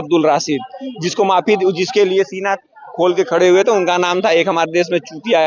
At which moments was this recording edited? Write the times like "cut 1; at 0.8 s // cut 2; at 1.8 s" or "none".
none